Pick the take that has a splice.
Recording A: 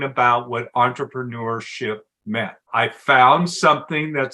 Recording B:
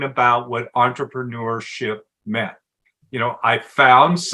A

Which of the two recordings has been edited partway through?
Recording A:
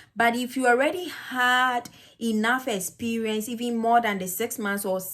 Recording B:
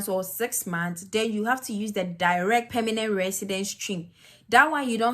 B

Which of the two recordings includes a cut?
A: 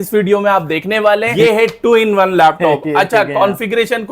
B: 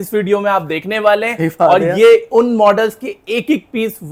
A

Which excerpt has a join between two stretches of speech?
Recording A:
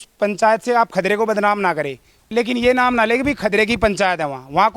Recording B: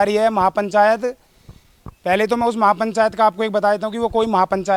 A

